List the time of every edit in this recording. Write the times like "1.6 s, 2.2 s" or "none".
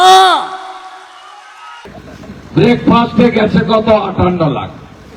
1.9 s